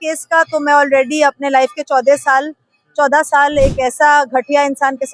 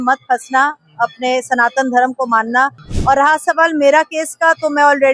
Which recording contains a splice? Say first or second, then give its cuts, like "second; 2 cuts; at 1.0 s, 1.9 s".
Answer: second; 1 cut; at 2.9 s